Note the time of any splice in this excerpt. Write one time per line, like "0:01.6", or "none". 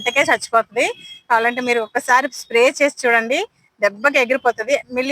none